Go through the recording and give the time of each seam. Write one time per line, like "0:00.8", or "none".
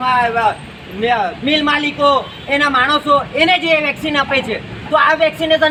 none